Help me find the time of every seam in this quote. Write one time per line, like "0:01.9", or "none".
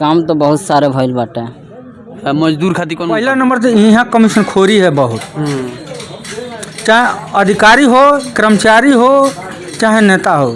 0:03.0